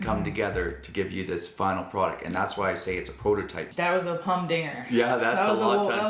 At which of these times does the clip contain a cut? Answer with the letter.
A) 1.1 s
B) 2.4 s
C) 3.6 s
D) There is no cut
C